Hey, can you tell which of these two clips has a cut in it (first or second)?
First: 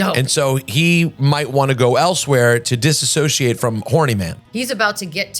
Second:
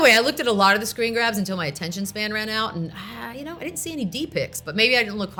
first